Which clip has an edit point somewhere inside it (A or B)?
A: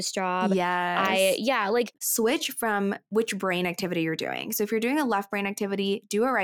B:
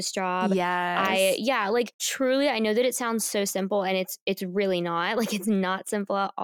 A